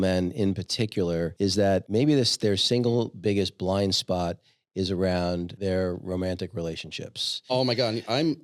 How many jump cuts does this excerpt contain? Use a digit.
3